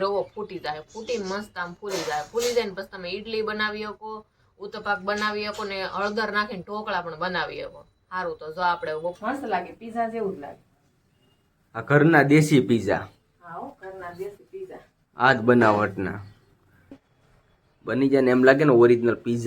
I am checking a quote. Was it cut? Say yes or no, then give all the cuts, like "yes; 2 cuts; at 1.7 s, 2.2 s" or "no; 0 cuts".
yes; 2 cuts; at 9.2 s, 16.9 s